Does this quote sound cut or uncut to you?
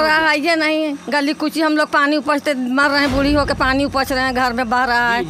uncut